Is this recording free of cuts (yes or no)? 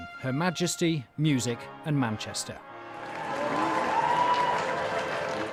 yes